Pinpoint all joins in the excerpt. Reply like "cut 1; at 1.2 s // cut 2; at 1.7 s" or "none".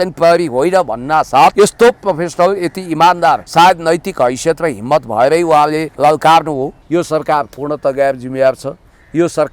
cut 1; at 1.5 s // cut 2; at 3.4 s // cut 3; at 5.9 s // cut 4; at 6.8 s